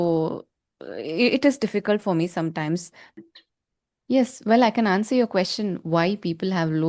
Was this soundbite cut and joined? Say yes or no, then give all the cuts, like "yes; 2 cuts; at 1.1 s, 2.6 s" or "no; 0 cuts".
yes; 1 cut; at 3.1 s